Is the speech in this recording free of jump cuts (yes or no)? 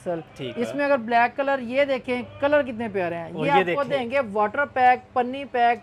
yes